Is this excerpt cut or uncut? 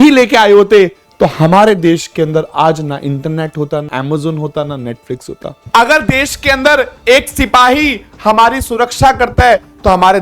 cut